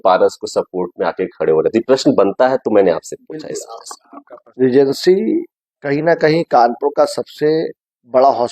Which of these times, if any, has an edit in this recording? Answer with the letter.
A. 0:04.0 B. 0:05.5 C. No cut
A